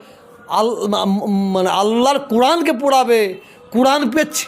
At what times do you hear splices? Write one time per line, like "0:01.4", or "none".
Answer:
none